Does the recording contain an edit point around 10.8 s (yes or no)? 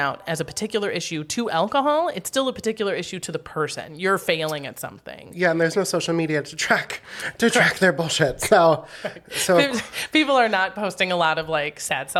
no